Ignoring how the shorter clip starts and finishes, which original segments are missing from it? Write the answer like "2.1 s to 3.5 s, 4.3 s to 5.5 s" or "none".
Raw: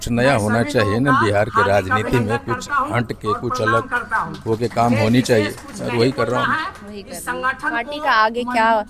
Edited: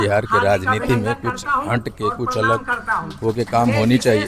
none